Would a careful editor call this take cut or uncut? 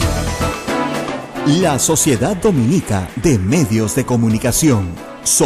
cut